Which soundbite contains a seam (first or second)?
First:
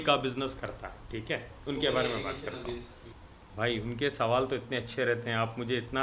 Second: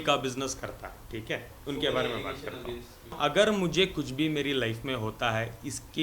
second